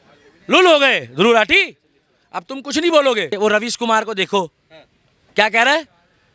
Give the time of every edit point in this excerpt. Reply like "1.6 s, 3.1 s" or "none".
3.3 s